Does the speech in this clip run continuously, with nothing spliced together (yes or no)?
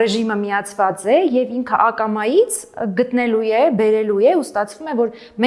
yes